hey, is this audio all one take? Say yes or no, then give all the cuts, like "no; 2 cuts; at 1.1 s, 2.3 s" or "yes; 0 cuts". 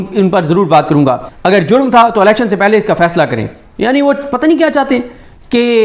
no; 1 cut; at 1.3 s